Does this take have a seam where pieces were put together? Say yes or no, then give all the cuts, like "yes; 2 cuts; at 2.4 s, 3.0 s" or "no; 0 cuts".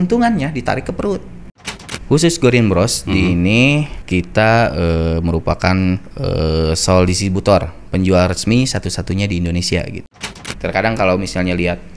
yes; 4 cuts; at 1.6 s, 4.0 s, 6.1 s, 10.3 s